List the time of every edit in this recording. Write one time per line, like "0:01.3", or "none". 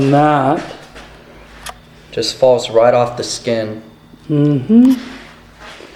none